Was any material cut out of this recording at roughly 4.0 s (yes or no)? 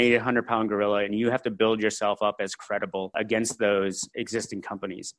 yes